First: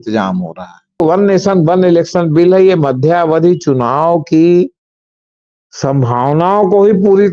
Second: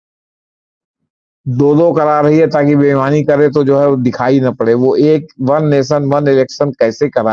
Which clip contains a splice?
first; 1 cut; at 1.0 s

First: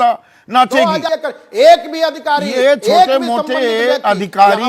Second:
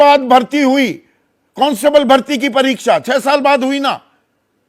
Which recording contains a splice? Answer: first; 1 cut; at 1.1 s

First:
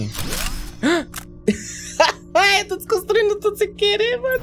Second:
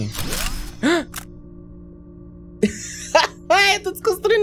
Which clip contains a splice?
first; 1 cut; at 1.2 s

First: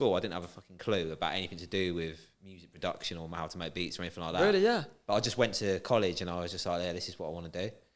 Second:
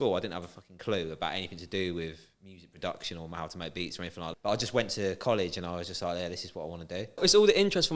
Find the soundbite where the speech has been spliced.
second; 2 cuts; at 4.3 s, 7.2 s

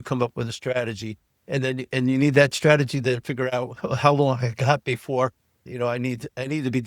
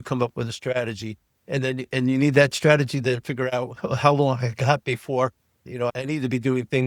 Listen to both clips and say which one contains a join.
second; 1 cut; at 5.9 s

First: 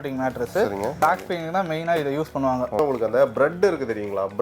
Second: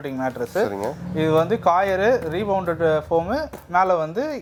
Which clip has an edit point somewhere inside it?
first; 2 cuts; at 1.0 s, 2.8 s

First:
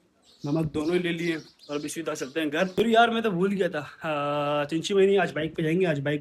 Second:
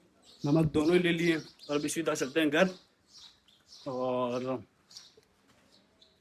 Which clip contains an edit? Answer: first; 1 cut; at 2.7 s

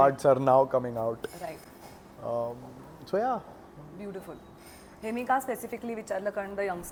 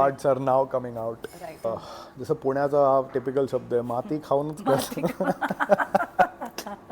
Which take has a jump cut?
second; 1 cut; at 1.7 s

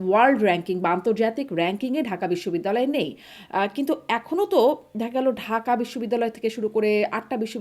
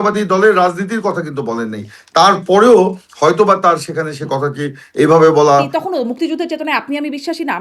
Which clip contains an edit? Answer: second; 1 cut; at 5.7 s

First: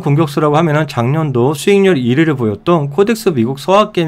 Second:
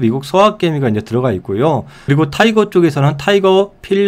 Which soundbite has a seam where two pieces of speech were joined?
second; 1 cut; at 2.0 s

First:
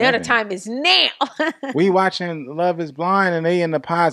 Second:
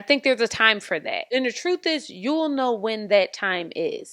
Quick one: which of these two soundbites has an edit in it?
second; 1 cut; at 1.3 s

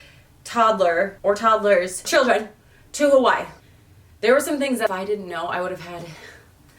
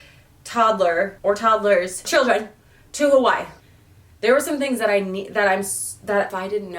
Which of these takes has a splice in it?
first; 1 cut; at 4.9 s

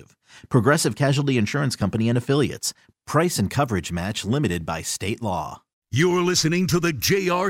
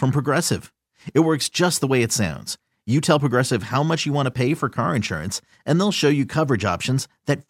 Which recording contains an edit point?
first; 1 cut; at 5.8 s

